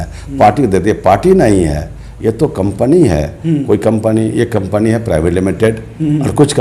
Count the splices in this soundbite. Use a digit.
0